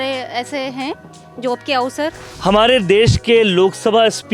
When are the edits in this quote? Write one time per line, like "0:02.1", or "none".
0:02.2